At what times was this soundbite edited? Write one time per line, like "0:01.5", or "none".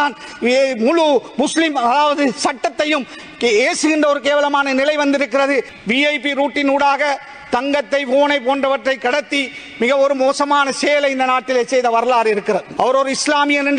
0:05.7
0:12.7